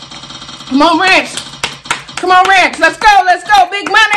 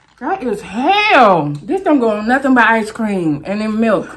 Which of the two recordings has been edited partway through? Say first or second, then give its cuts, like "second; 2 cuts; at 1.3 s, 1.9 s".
second; 1 cut; at 1.6 s